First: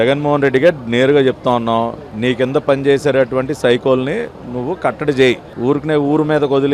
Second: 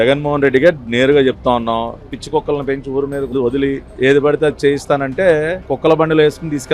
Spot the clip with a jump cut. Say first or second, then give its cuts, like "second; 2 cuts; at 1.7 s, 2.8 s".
second; 3 cuts; at 2.1 s, 3.3 s, 5.7 s